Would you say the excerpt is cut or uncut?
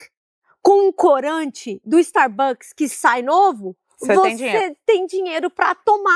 uncut